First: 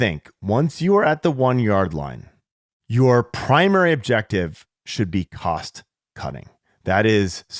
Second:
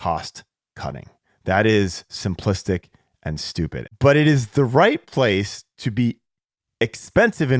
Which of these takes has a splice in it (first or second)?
second